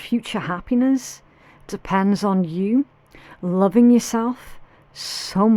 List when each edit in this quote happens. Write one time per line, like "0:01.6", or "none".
none